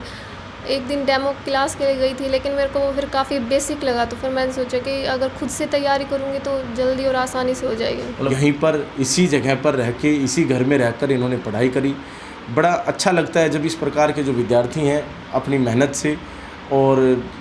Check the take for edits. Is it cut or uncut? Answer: cut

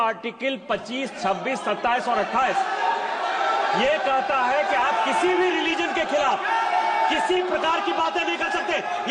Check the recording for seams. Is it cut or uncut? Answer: uncut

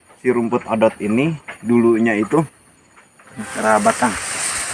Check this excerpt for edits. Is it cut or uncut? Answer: cut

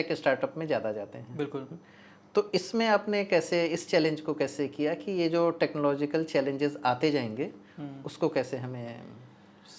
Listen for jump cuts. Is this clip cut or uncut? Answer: uncut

